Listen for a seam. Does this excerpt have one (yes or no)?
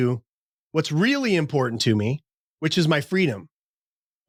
no